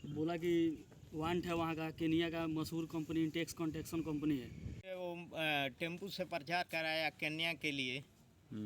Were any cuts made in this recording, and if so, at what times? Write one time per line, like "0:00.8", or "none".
0:04.8